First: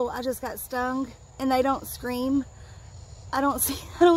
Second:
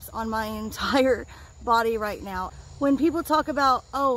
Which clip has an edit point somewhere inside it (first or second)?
second